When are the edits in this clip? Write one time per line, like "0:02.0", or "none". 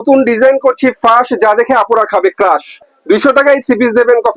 0:02.8

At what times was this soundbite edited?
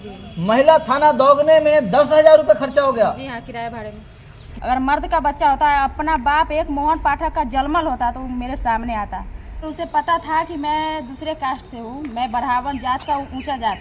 0:04.4
0:09.6

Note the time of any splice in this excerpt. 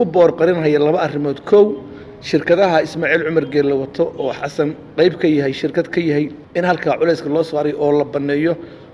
0:06.4

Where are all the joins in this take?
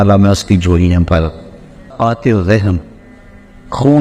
0:01.9

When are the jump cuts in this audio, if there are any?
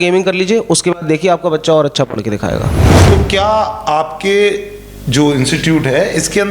0:03.0

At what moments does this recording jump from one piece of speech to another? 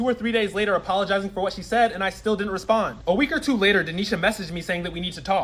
0:01.3
0:04.2

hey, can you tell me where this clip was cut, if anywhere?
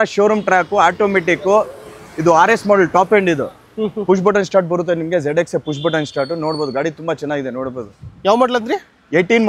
none

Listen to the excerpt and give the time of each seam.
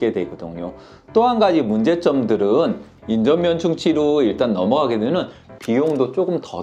0:02.9

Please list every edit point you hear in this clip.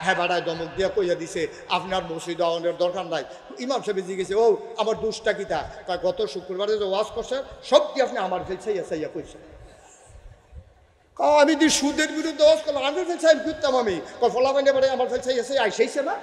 none

